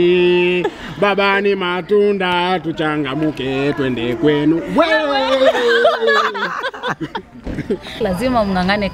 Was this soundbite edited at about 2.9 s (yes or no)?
no